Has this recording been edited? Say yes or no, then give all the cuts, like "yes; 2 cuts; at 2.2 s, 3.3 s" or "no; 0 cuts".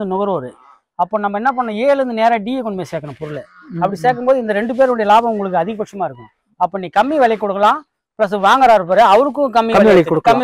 no; 0 cuts